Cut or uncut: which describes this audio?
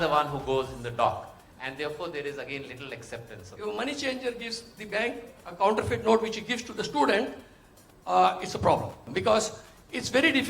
cut